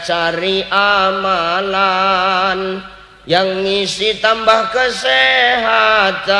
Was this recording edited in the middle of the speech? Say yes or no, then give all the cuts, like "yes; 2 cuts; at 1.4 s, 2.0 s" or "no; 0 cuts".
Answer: no; 0 cuts